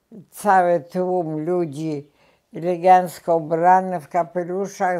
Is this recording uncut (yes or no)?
yes